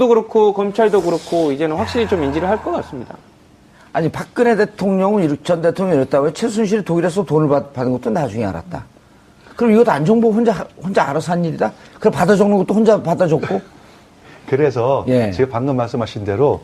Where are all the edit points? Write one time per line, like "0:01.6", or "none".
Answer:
none